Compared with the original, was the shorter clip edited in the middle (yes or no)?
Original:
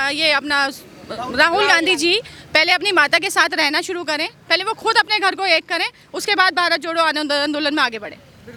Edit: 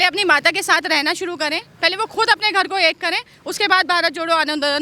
no